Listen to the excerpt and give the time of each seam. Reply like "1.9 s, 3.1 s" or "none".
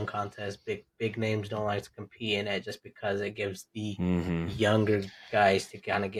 none